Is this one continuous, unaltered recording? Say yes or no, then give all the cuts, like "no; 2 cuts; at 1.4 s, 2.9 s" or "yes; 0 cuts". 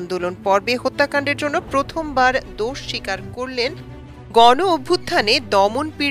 no; 1 cut; at 3.8 s